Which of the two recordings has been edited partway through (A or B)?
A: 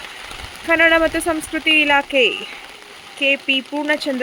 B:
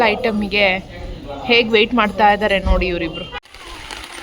B